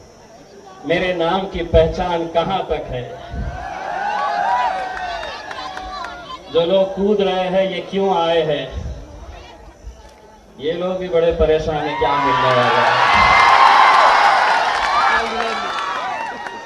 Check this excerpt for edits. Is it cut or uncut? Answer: uncut